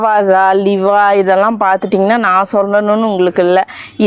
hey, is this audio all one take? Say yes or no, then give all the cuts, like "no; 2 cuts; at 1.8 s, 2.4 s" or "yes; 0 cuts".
yes; 0 cuts